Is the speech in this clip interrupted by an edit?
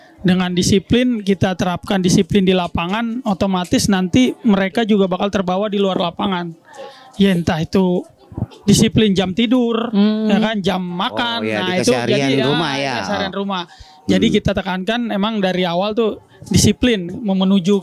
no; 0 cuts

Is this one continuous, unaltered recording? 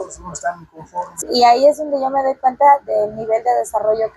no; 1 cut; at 1.2 s

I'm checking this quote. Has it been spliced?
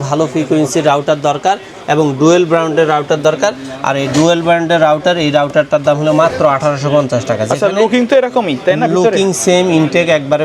no; 0 cuts

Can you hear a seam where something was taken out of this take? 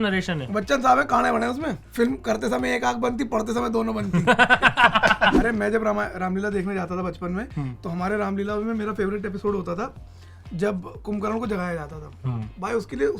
yes; 2 cuts; at 1.8 s, 5.3 s

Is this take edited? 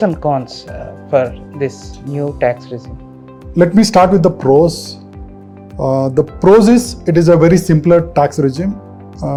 no; 0 cuts

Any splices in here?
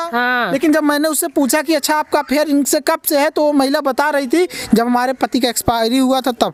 no; 0 cuts

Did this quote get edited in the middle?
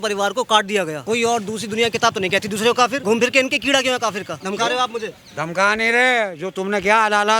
yes; 3 cuts; at 1.0 s, 3.0 s, 4.3 s

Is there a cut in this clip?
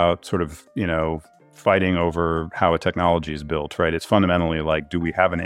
no; 0 cuts

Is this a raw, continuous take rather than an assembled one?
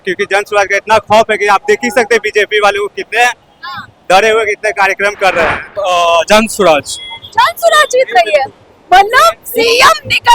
no; 1 cut; at 5.7 s

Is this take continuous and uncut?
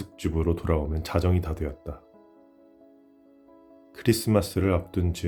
yes; 0 cuts

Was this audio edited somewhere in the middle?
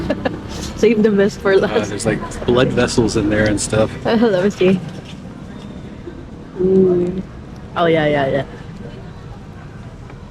no; 0 cuts

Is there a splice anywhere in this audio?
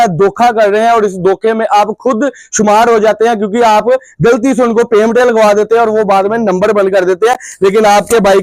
no; 0 cuts

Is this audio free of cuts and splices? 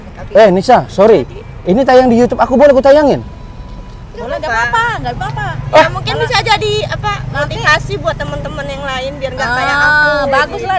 yes; 0 cuts

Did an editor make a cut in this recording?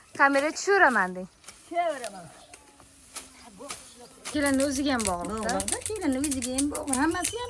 yes; 1 cut; at 4.3 s

